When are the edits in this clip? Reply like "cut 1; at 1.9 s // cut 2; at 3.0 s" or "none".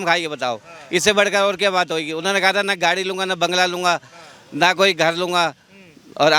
none